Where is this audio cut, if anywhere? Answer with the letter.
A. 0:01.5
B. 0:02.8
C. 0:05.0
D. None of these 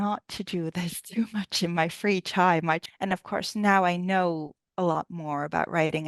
B